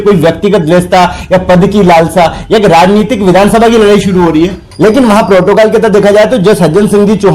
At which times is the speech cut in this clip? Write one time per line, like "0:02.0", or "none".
0:04.6